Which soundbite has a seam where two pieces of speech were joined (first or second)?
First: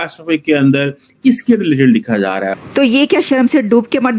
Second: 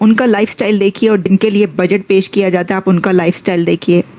first